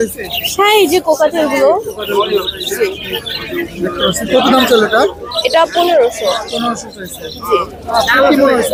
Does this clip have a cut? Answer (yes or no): no